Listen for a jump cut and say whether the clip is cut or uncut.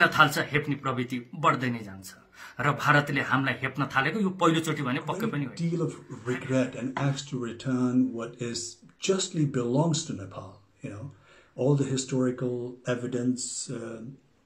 cut